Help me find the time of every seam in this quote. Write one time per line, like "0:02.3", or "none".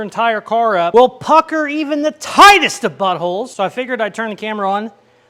none